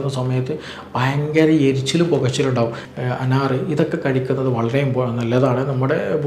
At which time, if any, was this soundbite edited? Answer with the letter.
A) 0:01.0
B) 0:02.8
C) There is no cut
B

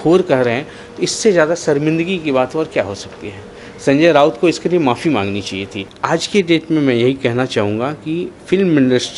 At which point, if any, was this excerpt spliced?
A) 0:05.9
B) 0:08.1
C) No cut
A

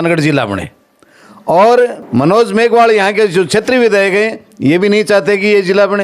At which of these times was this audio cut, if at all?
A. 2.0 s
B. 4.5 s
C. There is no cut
A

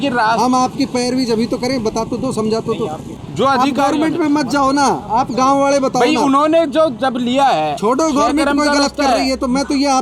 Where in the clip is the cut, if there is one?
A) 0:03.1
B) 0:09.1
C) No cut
A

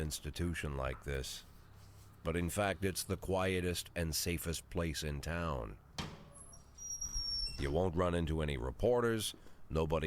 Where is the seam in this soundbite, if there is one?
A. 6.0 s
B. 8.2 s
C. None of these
A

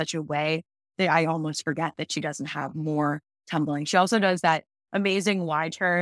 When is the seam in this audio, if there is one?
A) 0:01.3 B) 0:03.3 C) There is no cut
C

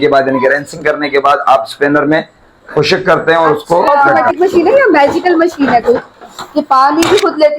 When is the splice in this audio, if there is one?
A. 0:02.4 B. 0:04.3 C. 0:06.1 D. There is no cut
B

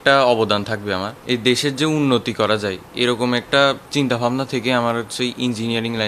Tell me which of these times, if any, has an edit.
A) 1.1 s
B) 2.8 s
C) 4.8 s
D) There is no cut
A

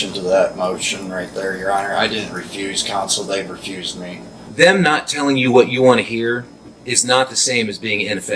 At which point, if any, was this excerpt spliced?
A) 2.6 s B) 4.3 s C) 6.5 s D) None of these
B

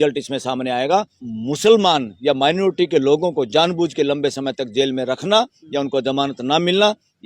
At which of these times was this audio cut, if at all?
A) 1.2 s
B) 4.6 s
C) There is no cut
A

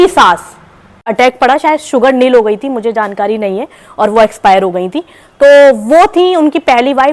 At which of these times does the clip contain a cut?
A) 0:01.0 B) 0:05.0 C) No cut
A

